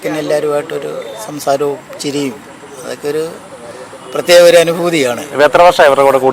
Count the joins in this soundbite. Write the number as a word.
zero